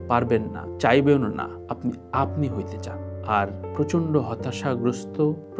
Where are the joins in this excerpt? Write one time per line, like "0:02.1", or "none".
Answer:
none